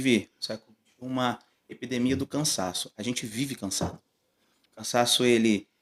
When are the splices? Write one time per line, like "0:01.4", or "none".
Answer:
none